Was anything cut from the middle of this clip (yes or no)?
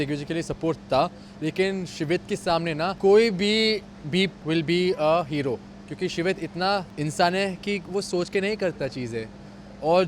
yes